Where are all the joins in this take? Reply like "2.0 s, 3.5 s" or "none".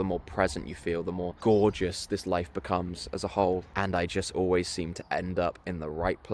1.3 s, 3.7 s